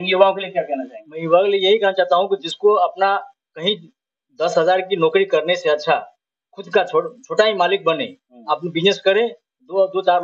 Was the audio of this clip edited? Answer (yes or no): no